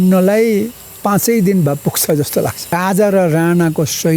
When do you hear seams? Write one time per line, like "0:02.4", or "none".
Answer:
0:02.7